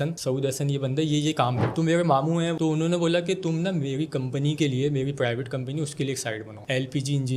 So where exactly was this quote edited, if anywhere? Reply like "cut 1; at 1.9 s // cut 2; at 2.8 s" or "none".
cut 1; at 1.7 s // cut 2; at 2.6 s